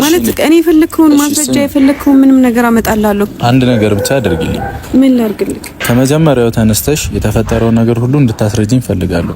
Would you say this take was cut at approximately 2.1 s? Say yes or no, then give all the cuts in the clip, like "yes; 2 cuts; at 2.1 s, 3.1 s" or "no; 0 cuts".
no; 2 cuts; at 3.3 s, 5.8 s